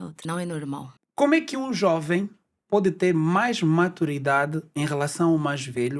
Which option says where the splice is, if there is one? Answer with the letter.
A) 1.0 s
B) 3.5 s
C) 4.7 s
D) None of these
A